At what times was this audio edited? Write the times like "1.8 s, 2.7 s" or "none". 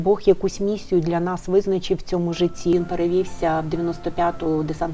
2.7 s